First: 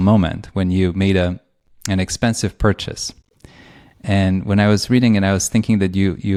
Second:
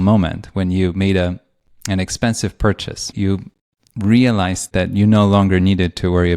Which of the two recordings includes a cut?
second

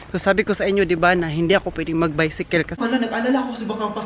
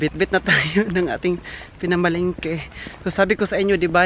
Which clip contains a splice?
first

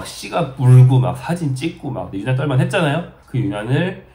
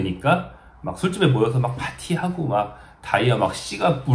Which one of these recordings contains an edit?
first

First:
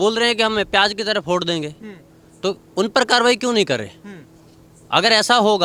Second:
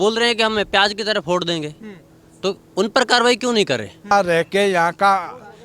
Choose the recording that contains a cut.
second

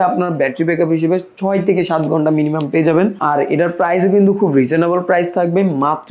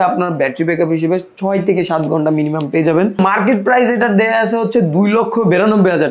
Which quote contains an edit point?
second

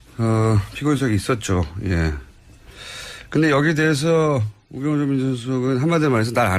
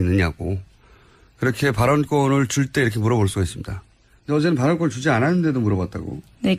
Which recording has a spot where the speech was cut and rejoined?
first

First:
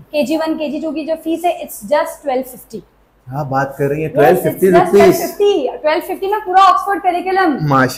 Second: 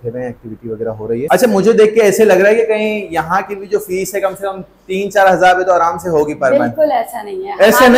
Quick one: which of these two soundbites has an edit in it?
second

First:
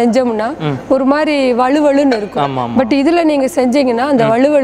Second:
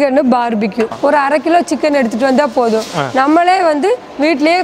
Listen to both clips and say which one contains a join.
second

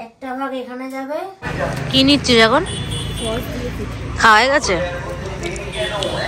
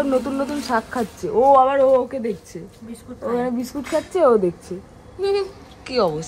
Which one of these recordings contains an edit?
first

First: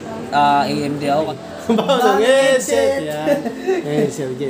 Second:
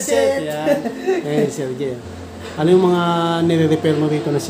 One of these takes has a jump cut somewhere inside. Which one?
first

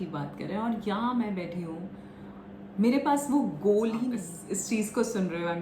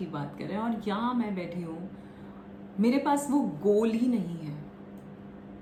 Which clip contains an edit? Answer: first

